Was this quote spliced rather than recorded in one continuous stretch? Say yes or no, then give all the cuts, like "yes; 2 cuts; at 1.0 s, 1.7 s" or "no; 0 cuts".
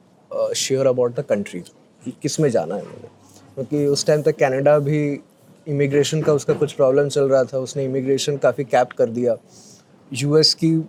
no; 0 cuts